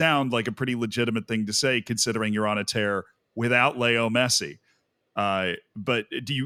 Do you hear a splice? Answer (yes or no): no